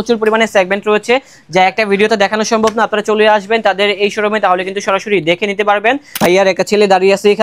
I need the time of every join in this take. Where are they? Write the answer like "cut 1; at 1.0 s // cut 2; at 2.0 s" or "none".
cut 1; at 6.2 s